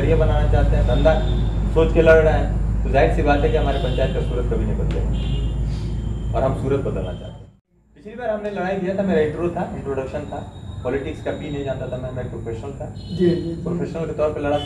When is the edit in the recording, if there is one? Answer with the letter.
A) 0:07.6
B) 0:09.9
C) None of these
A